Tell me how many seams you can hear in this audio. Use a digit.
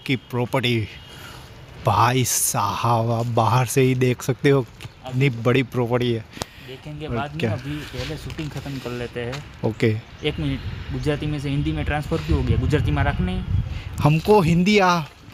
0